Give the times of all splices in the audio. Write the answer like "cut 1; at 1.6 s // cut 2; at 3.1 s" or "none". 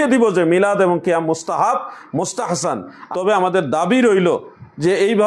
cut 1; at 3.0 s